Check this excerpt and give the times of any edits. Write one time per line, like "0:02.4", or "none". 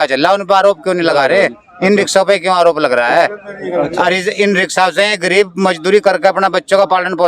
none

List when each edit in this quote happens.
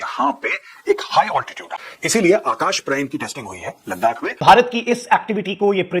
0:01.9
0:04.4

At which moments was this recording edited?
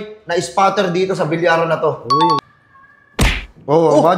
0:02.4

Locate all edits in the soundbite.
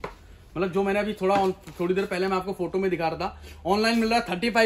none

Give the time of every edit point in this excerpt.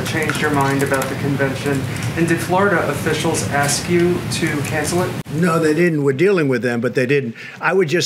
none

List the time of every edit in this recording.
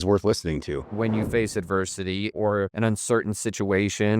0:00.9
0:02.4

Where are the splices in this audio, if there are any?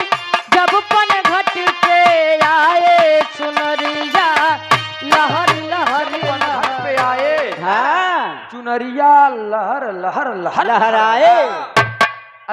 0:06.8

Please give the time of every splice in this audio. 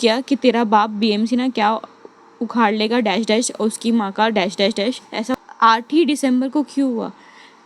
0:05.4

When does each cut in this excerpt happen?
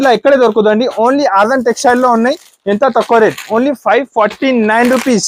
none

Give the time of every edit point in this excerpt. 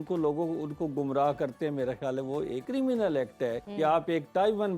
0:02.6
0:03.6

